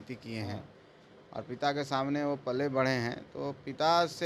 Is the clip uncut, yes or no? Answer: yes